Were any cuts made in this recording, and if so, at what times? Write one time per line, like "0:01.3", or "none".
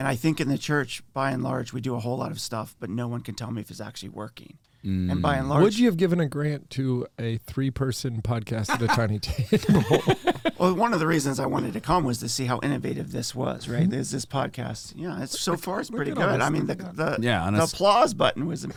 none